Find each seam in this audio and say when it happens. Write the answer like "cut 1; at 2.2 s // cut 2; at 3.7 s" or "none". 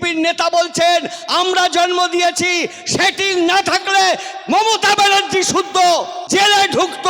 cut 1; at 6.2 s